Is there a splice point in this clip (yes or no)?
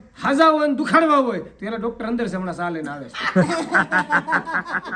no